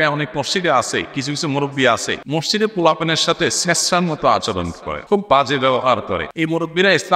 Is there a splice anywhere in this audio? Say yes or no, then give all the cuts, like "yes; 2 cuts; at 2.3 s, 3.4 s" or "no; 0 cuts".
yes; 3 cuts; at 2.2 s, 4.9 s, 6.3 s